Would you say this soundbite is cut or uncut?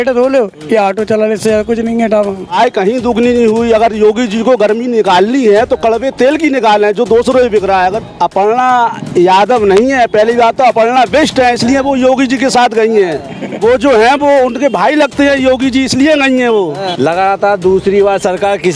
cut